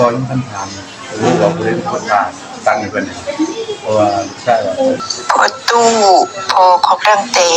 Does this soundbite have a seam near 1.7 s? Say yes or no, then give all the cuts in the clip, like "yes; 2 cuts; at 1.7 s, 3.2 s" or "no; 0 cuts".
no; 1 cut; at 5.0 s